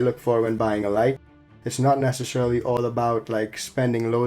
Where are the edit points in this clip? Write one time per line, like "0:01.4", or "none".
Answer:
0:01.5